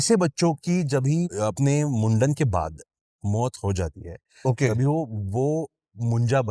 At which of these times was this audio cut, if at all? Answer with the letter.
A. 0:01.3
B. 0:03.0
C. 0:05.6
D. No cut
A